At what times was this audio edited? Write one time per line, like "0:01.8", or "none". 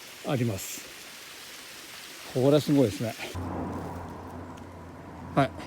0:03.3